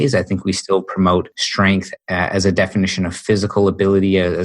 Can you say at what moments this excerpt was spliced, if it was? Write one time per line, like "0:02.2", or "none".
0:01.4